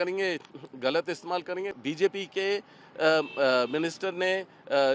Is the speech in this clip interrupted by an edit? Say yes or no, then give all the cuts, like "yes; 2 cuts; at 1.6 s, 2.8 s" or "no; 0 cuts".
yes; 1 cut; at 1.7 s